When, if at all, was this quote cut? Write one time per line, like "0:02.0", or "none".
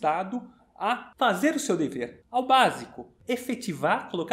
0:01.1
0:02.2
0:03.1